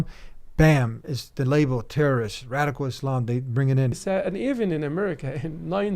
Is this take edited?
yes; 1 cut; at 4.0 s

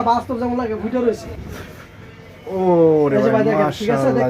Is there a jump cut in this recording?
yes; 1 cut; at 1.3 s

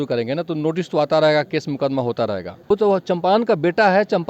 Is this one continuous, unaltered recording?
no; 1 cut; at 2.7 s

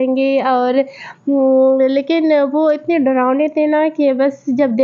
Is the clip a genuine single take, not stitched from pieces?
yes; 0 cuts

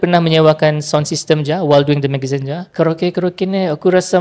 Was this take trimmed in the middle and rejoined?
yes; 1 cut; at 2.6 s

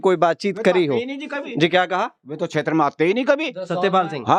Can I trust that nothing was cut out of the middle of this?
yes; 0 cuts

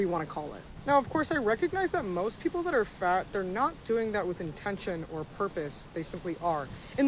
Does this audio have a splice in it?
yes; 2 cuts; at 1.1 s, 5.3 s

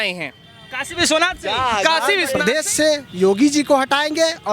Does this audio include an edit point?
yes; 1 cut; at 2.4 s

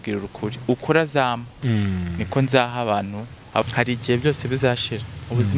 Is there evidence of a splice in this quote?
yes; 1 cut; at 3.6 s

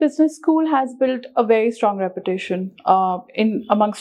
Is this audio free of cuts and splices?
yes; 0 cuts

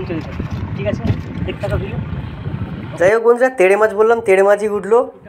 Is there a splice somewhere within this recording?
no; 0 cuts

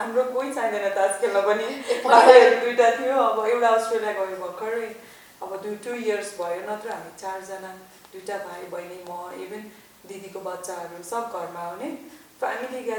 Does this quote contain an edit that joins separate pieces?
no; 0 cuts

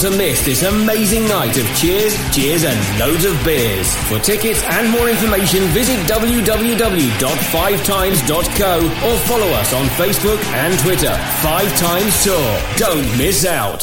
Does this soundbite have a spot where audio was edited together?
no; 0 cuts

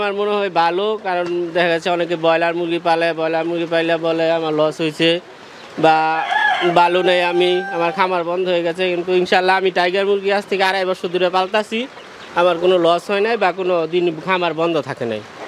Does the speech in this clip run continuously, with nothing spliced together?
yes; 0 cuts

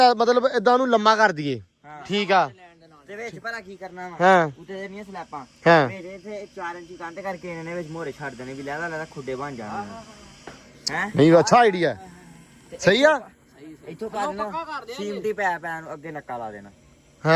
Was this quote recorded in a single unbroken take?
yes; 0 cuts

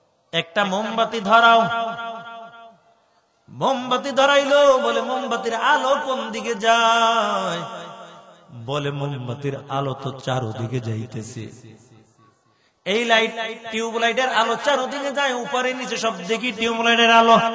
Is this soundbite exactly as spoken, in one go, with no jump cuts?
yes; 0 cuts

